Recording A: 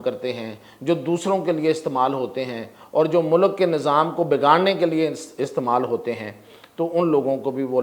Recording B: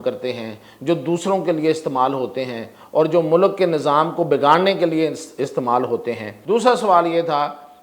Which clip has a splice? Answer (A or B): B